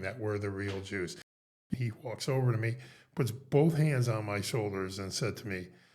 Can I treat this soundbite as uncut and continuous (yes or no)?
no